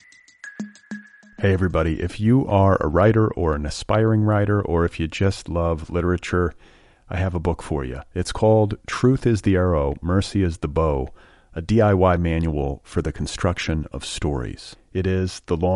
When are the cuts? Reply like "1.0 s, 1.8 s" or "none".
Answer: 0.9 s